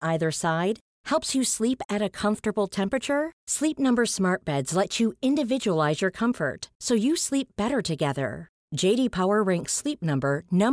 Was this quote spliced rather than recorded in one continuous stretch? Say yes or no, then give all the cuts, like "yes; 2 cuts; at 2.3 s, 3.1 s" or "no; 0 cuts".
no; 0 cuts